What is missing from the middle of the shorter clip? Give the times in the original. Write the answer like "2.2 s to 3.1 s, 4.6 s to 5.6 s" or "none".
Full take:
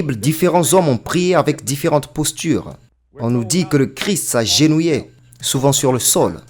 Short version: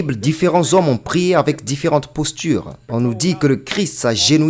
2.8 s to 3.1 s